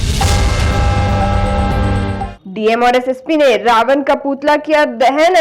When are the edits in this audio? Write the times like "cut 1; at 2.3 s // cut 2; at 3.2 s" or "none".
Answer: cut 1; at 2.3 s